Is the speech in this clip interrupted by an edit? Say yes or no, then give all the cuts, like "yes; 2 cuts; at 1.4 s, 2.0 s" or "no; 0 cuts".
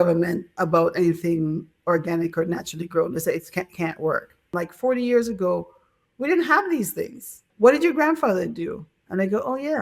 yes; 2 cuts; at 4.6 s, 7.4 s